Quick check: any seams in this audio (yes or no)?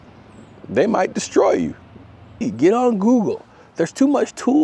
yes